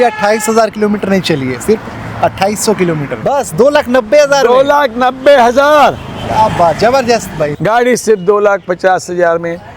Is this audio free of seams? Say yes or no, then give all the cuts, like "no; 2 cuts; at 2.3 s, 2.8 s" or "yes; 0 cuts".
no; 2 cuts; at 3.1 s, 7.5 s